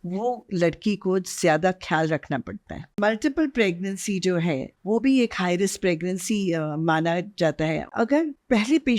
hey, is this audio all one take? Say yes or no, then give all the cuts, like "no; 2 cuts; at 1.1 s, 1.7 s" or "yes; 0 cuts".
no; 3 cuts; at 3.0 s, 4.7 s, 8.0 s